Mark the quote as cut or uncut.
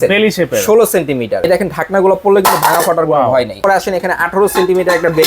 cut